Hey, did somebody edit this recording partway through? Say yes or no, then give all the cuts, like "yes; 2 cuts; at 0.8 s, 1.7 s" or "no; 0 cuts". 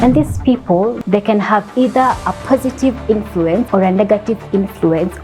yes; 2 cuts; at 1.0 s, 3.7 s